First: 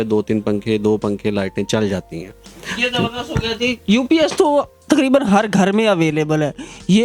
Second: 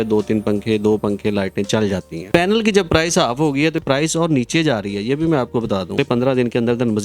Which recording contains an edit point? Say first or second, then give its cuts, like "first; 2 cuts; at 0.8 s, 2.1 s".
second; 3 cuts; at 2.3 s, 3.8 s, 5.9 s